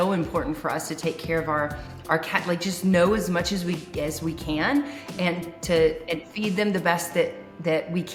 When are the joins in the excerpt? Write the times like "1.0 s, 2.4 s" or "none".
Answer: none

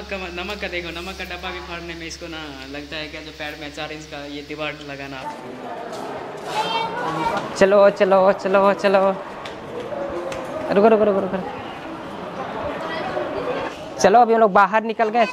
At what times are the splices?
5.2 s

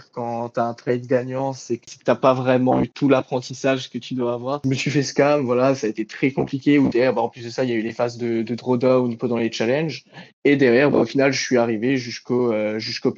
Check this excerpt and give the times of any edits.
1.9 s, 4.6 s

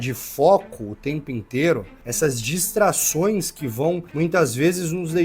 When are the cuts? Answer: 2.0 s, 4.1 s

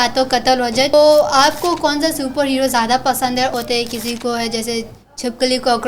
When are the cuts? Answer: 0.9 s, 3.5 s

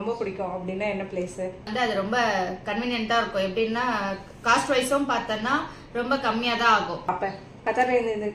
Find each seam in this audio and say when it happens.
1.7 s, 7.1 s

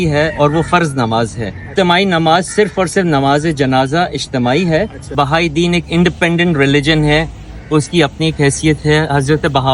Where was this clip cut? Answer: 1.7 s, 5.0 s

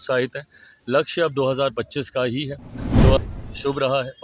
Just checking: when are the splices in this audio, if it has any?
3.2 s

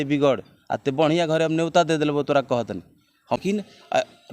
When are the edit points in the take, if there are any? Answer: 3.4 s

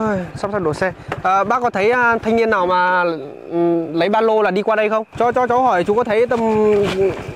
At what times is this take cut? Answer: 5.1 s

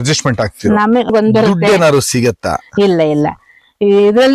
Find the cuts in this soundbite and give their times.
1.1 s

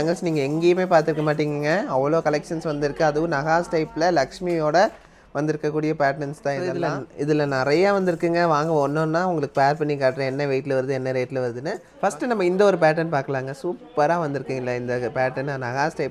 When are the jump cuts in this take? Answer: none

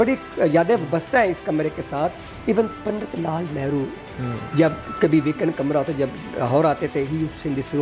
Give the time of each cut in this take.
none

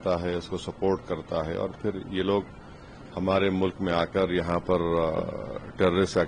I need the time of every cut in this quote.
none

